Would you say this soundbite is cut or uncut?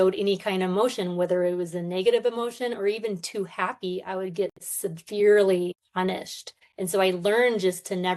cut